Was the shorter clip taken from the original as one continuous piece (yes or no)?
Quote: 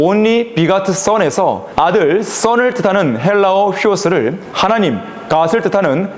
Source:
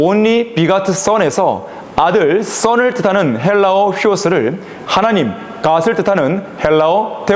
no